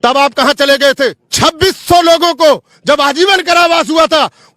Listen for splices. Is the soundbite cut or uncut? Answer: cut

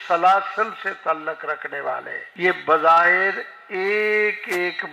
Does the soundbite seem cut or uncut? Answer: cut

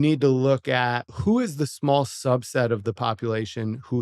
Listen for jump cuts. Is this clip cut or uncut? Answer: cut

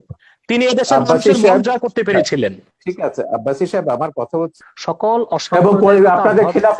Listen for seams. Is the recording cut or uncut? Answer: cut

